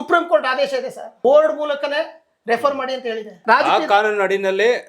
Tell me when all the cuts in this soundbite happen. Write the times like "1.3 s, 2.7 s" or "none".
1.0 s, 3.3 s

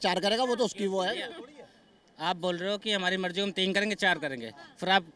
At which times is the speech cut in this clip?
none

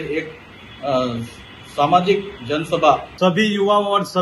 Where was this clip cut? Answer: 3.1 s

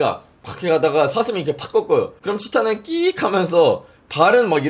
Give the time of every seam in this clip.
2.2 s

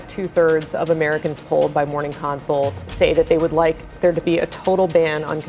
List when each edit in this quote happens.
2.8 s

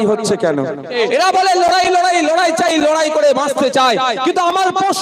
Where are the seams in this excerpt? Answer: 0.9 s

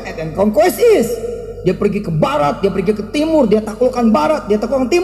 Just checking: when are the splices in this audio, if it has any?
none

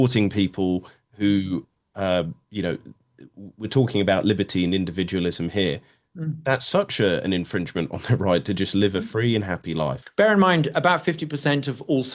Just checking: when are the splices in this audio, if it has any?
10.0 s

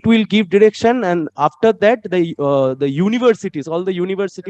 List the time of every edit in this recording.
none

